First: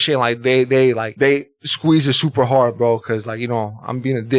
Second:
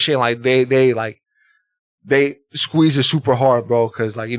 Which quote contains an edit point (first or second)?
first